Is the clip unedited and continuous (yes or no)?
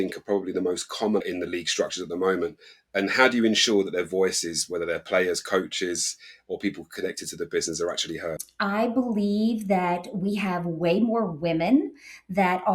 no